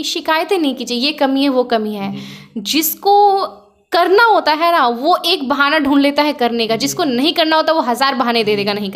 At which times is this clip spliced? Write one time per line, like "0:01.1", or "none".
none